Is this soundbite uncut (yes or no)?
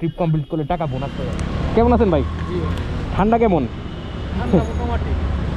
no